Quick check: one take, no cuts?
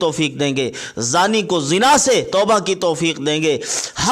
yes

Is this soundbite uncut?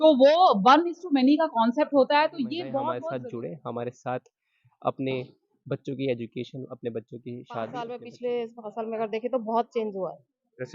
no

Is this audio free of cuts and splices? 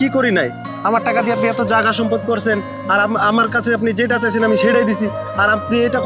yes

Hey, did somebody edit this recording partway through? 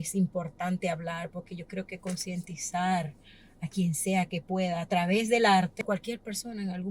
yes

